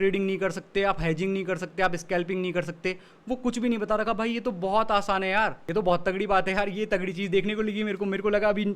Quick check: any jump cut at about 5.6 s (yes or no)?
yes